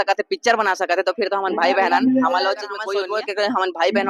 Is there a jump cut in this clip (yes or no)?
yes